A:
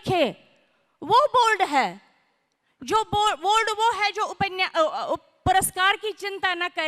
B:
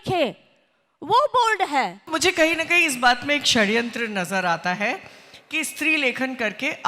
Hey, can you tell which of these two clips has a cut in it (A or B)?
B